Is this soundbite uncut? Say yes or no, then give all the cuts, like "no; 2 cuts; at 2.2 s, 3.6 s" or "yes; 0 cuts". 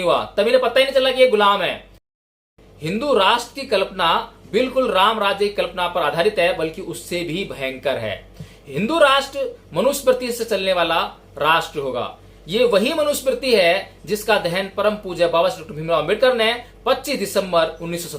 no; 1 cut; at 2.1 s